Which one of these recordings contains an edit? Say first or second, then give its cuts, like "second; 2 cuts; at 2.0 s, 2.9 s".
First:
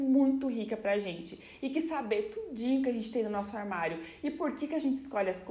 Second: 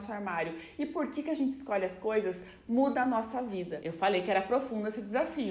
second; 1 cut; at 3.7 s